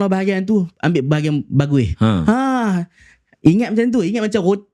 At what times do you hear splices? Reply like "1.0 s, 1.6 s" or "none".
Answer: none